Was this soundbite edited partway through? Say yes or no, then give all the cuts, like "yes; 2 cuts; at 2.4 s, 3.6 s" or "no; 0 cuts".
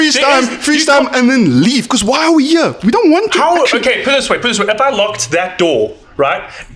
no; 0 cuts